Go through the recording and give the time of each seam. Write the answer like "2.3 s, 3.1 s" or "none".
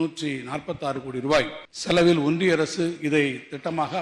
1.7 s